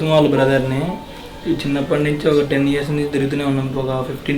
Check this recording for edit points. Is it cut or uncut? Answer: uncut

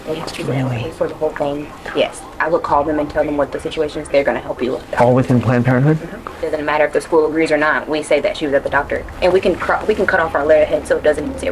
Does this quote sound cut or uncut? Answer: cut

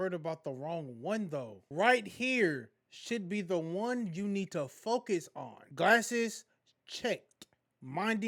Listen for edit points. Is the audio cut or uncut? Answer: uncut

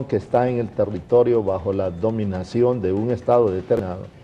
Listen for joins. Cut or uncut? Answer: cut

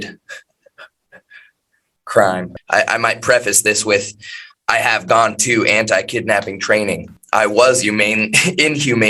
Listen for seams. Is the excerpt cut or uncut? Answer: cut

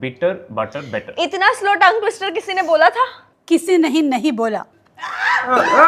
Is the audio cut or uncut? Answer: cut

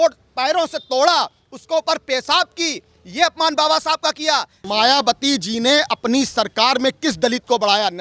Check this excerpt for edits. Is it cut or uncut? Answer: cut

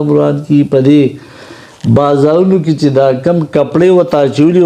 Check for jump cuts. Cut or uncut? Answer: uncut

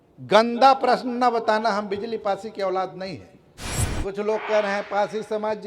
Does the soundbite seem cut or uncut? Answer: cut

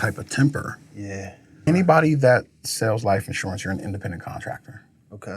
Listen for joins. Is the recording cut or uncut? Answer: cut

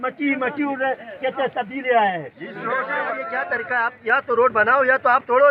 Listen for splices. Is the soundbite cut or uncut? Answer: cut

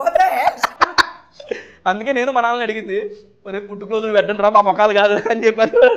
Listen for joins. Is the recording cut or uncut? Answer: uncut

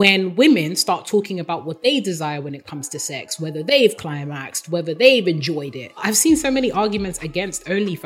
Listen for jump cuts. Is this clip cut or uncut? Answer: cut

